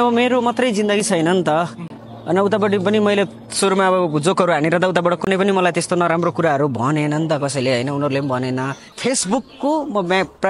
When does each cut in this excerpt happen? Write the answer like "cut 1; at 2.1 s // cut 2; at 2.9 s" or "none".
cut 1; at 8.8 s